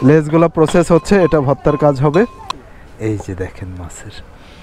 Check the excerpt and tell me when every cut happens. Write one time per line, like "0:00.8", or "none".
0:02.5